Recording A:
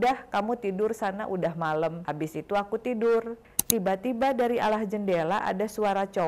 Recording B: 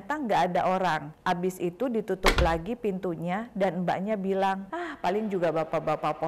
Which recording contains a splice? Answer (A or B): A